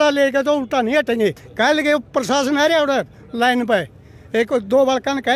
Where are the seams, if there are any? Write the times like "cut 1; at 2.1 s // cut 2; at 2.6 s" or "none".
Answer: cut 1; at 1.5 s